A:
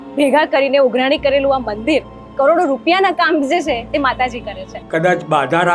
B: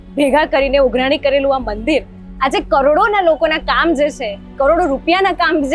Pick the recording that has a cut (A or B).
A